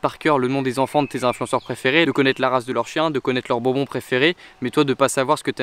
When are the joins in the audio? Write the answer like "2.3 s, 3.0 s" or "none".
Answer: none